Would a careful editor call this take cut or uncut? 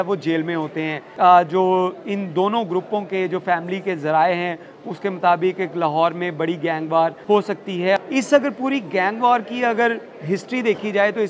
cut